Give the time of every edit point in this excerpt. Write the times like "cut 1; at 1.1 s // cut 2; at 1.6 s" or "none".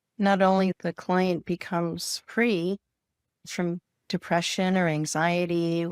cut 1; at 0.8 s // cut 2; at 3.5 s